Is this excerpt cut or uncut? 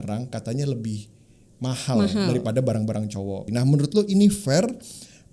cut